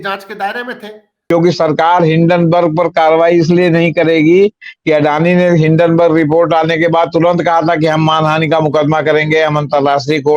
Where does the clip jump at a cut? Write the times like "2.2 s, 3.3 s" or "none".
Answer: 1.1 s

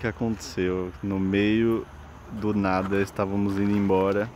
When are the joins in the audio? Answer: none

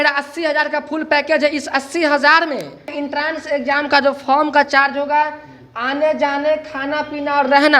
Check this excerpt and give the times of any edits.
2.9 s

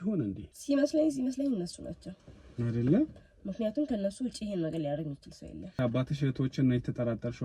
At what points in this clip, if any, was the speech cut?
5.7 s

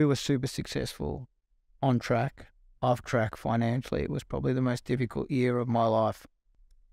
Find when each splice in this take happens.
none

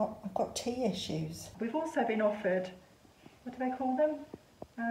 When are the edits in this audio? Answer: 1.5 s

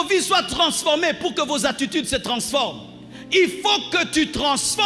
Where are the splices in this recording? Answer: none

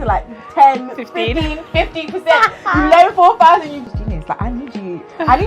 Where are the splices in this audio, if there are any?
3.9 s

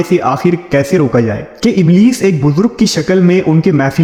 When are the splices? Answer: none

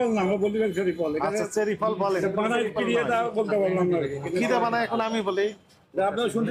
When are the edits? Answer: none

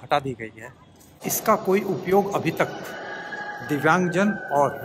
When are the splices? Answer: 1.2 s

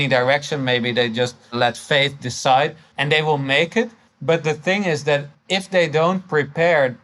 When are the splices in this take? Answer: 1.5 s, 2.9 s, 4.1 s, 5.4 s

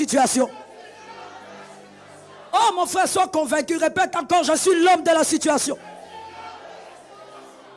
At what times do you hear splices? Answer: none

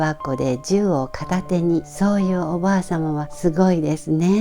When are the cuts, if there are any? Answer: 1.9 s, 3.3 s

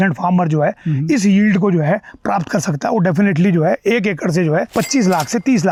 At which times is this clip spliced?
none

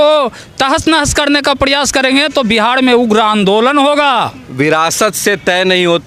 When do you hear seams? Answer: 4.4 s

